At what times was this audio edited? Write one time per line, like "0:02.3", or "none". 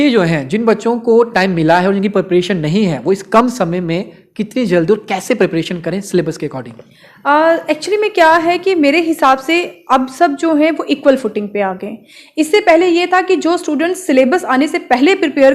none